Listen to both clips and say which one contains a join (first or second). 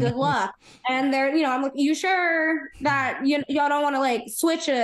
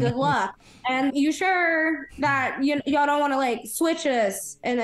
second